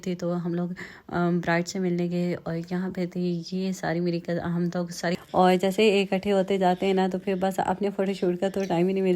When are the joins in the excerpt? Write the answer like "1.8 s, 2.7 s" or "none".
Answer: 5.2 s